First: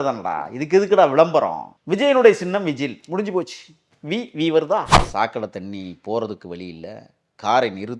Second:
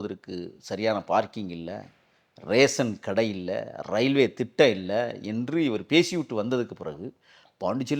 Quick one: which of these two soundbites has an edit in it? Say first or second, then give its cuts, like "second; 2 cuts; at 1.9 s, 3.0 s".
first; 1 cut; at 4.9 s